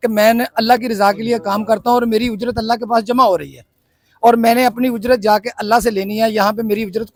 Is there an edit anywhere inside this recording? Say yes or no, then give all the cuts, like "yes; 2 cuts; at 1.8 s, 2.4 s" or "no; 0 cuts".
no; 0 cuts